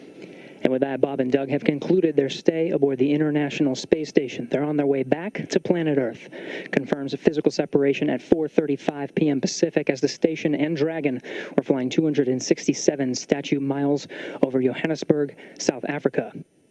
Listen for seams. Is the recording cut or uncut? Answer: uncut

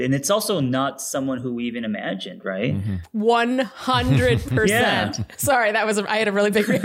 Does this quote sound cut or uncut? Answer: cut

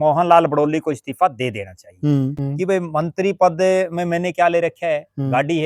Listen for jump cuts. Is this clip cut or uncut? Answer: cut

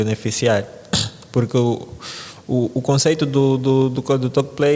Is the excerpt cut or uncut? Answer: uncut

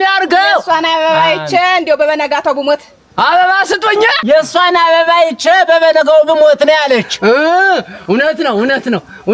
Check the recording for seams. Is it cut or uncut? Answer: cut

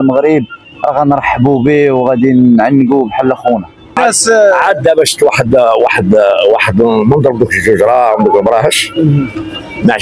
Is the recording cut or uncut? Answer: cut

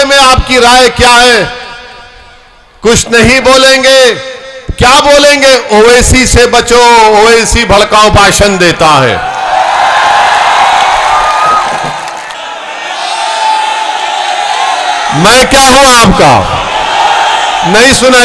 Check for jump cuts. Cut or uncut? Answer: cut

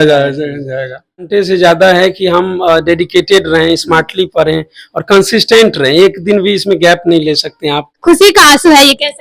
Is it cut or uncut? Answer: cut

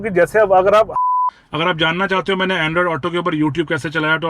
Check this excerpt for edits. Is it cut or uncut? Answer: cut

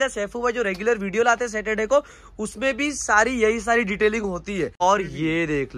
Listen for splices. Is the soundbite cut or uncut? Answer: cut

